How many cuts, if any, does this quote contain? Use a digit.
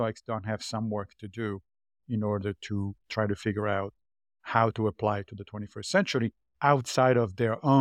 0